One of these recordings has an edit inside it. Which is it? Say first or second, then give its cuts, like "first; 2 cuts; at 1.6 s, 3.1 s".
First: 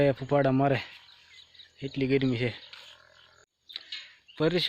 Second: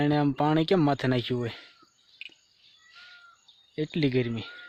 first; 1 cut; at 3.6 s